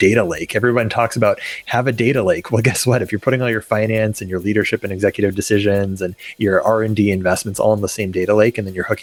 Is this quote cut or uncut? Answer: uncut